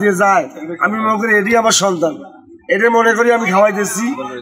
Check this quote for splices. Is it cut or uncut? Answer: uncut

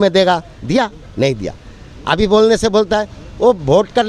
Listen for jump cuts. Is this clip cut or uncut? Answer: uncut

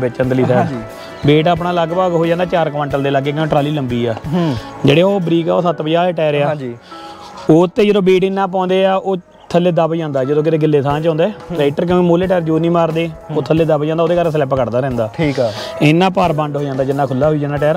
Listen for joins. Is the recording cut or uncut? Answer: uncut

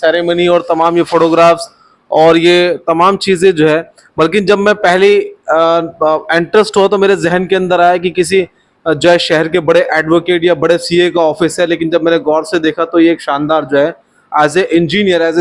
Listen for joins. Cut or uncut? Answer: uncut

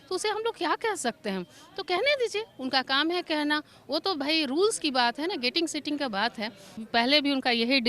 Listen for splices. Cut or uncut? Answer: cut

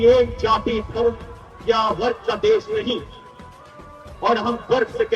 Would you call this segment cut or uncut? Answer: uncut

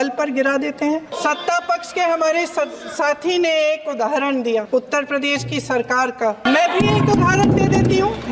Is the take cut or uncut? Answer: cut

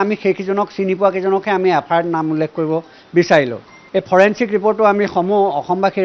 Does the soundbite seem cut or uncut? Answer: cut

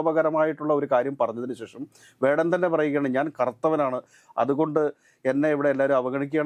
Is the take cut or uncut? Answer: uncut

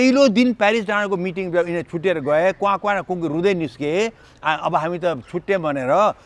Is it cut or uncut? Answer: uncut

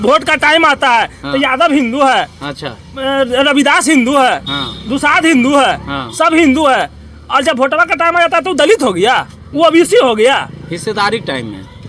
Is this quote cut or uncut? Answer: uncut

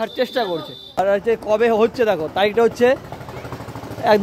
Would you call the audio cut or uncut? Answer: cut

